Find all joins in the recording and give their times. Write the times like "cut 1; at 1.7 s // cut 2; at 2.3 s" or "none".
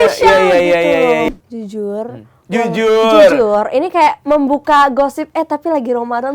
cut 1; at 1.3 s